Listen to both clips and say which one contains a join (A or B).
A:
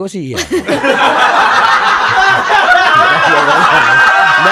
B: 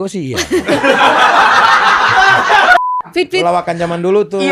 B